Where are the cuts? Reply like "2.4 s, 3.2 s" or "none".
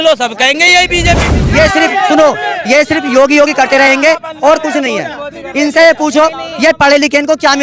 1.3 s